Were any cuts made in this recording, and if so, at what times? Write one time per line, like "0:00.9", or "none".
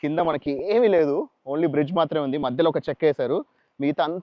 none